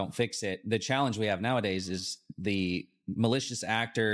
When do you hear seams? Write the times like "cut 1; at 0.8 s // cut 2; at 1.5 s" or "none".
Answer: none